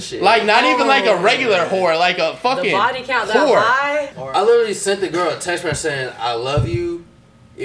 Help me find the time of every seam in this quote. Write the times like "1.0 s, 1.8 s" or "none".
4.1 s